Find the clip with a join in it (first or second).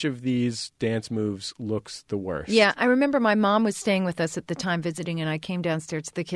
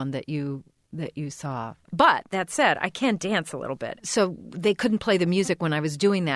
second